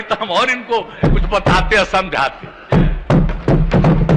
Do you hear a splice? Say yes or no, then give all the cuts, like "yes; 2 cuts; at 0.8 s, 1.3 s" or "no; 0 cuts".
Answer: no; 0 cuts